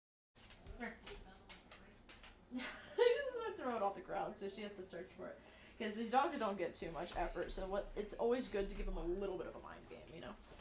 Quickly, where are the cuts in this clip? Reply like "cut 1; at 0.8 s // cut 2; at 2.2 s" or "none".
cut 1; at 1.2 s